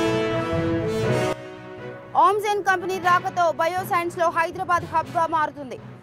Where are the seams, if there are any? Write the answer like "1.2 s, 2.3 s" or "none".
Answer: 1.4 s